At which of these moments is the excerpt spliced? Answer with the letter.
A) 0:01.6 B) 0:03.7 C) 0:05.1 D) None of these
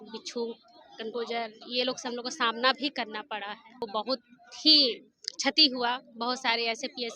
B